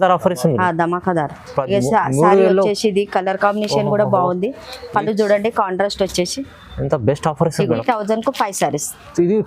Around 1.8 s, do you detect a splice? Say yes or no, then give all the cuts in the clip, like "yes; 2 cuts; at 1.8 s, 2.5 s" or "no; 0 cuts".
no; 1 cut; at 7.7 s